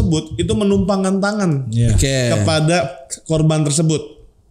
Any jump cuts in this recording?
no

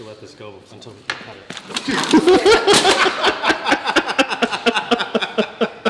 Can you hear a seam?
no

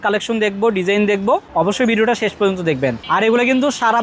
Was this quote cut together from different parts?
no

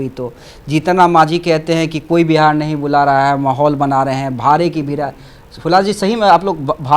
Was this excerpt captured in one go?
yes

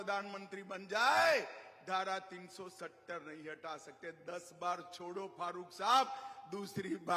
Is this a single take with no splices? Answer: yes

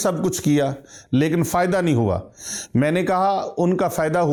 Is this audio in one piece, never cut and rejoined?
yes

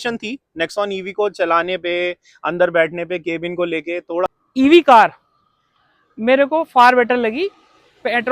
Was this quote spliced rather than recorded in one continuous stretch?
yes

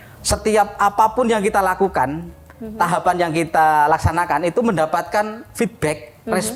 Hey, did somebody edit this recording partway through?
no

